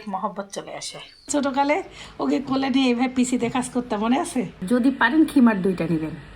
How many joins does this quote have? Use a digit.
2